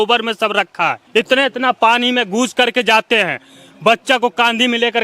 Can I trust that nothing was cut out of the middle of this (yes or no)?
no